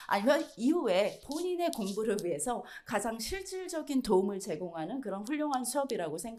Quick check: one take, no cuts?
yes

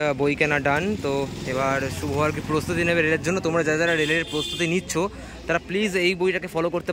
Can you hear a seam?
no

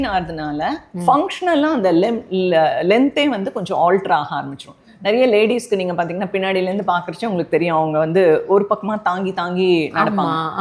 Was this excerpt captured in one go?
yes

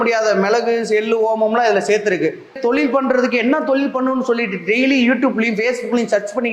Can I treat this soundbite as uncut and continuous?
no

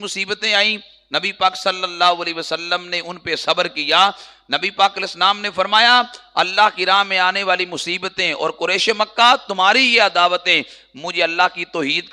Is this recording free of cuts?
yes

